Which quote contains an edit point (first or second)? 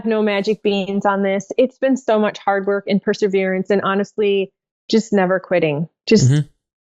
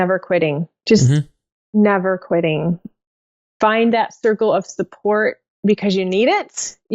second